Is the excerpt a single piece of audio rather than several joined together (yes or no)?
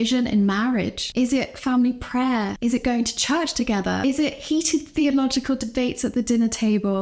no